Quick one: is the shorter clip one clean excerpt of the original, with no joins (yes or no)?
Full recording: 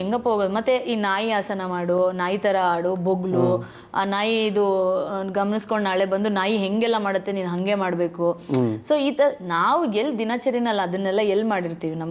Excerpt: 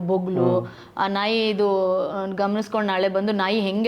yes